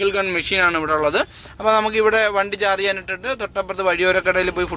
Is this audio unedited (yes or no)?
yes